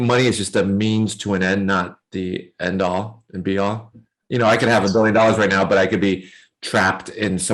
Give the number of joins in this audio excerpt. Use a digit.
0